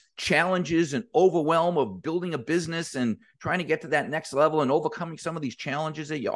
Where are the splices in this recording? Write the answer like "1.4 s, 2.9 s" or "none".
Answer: none